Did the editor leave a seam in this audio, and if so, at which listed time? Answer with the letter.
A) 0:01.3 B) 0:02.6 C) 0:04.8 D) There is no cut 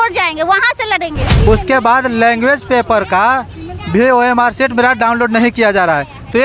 A